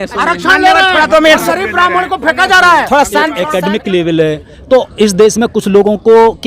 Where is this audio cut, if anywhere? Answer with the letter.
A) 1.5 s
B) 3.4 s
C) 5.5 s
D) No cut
B